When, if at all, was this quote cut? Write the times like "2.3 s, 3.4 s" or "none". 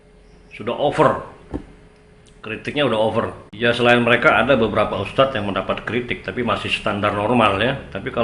3.4 s